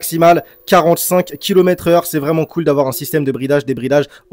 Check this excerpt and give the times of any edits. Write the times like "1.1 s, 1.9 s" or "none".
none

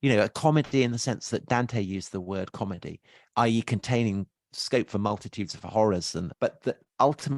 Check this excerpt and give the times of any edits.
4.5 s, 6.3 s

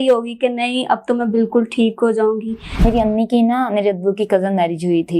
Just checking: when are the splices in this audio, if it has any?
2.8 s

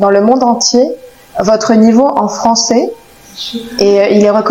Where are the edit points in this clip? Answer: none

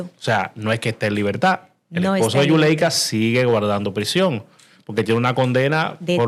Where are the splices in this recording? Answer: none

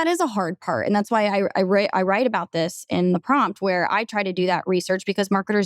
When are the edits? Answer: none

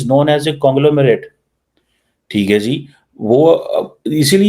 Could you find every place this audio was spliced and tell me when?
none

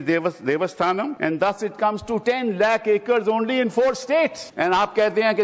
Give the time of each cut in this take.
1.1 s, 2.2 s, 4.4 s

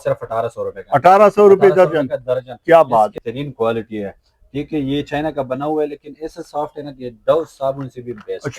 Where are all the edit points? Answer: 3.1 s

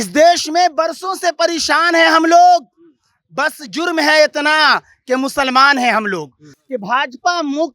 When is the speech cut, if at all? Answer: 6.5 s

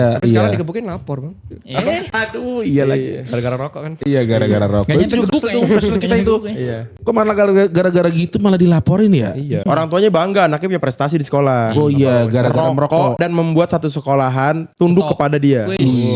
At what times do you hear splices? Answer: none

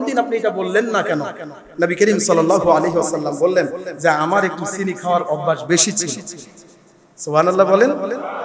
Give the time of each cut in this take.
none

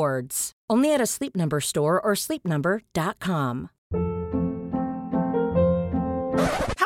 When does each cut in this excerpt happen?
3.7 s

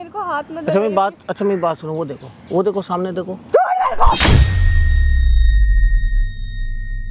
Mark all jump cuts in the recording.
none

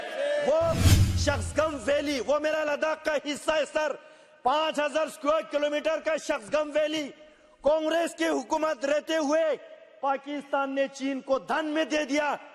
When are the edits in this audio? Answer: 0.9 s

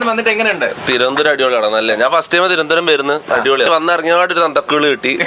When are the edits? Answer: 3.7 s

